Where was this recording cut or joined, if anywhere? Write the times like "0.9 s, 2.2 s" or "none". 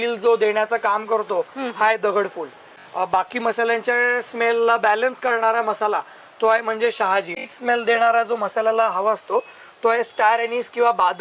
2.7 s, 7.4 s